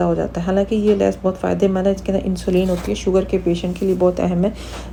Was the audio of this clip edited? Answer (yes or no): no